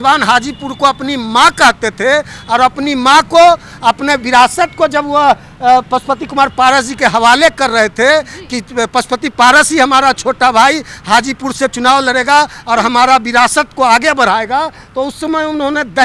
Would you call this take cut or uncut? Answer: uncut